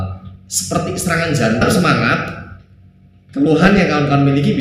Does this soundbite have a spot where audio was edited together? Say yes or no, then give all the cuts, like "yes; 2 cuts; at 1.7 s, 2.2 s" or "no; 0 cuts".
yes; 1 cut; at 1.7 s